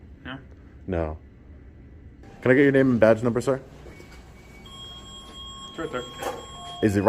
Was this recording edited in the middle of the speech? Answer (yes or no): yes